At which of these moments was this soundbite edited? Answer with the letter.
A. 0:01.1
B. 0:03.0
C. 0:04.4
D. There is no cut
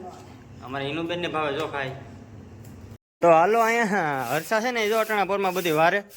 B